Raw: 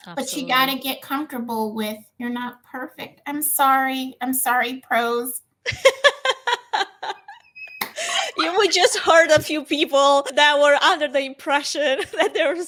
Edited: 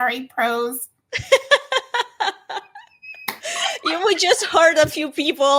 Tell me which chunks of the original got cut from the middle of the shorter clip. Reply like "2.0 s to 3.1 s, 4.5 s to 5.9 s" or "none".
none